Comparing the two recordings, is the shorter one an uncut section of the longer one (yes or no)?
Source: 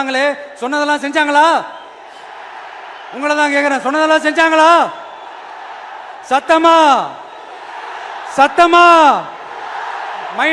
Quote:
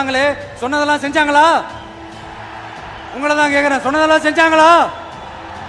yes